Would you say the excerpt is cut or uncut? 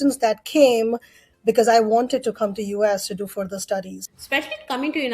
cut